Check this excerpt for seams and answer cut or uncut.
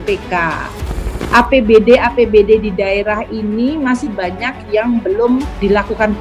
cut